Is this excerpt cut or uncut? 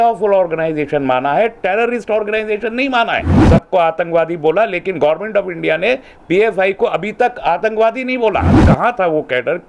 cut